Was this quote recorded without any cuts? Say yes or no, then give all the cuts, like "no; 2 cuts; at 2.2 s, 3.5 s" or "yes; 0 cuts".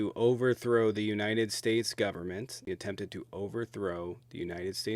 no; 1 cut; at 2.6 s